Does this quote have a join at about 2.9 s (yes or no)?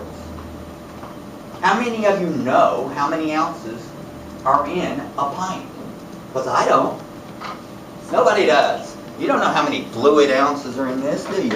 yes